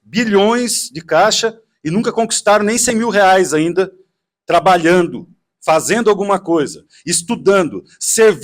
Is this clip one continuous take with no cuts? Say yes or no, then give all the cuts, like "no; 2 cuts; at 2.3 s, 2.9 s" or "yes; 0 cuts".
yes; 0 cuts